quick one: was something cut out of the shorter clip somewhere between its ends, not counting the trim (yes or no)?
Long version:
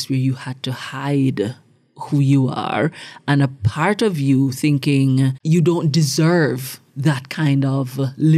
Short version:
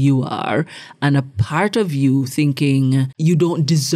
no